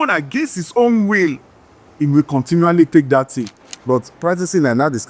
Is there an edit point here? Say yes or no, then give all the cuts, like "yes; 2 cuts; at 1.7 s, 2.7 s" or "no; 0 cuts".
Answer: yes; 1 cut; at 3.5 s